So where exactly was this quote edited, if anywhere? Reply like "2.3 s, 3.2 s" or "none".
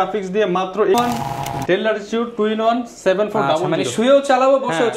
0.9 s

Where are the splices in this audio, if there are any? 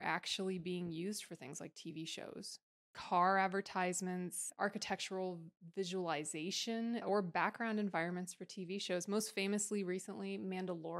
4.5 s, 7.0 s

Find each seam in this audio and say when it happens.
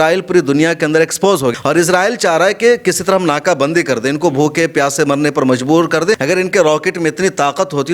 1.5 s, 6.2 s

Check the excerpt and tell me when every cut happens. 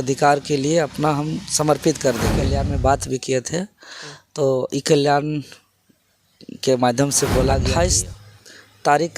2.6 s, 7.7 s

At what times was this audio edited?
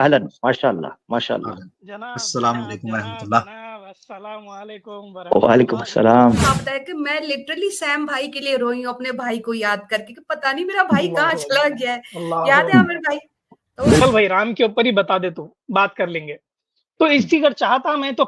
6.5 s, 14.0 s

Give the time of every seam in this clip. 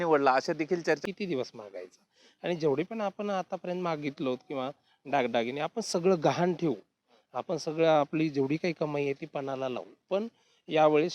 1.0 s

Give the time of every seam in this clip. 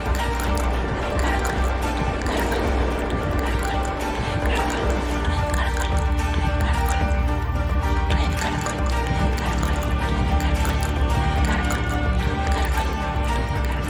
none

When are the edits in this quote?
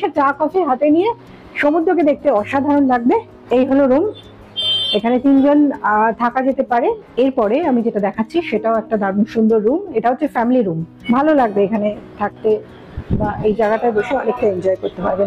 3.3 s, 7.0 s, 10.9 s

